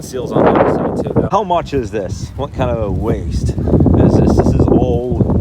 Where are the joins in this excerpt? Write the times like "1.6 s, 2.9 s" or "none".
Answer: 1.3 s